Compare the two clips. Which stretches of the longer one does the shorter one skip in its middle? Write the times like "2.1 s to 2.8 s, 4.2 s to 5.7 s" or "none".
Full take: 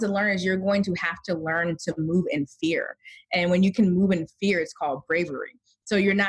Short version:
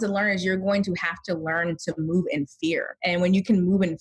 2.9 s to 3.2 s